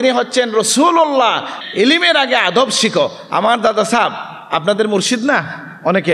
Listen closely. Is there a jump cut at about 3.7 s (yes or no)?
no